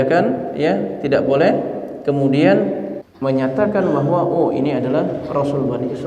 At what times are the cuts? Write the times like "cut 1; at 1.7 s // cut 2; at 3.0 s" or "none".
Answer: cut 1; at 2.9 s